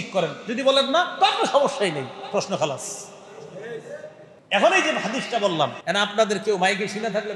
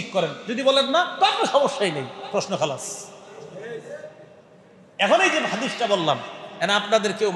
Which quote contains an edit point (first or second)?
first